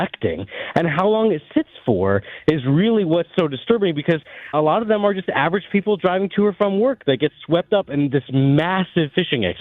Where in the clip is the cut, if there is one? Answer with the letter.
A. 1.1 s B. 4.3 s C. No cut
B